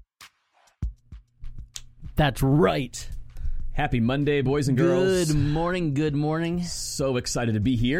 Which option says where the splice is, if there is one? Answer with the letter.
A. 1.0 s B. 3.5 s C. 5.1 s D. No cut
A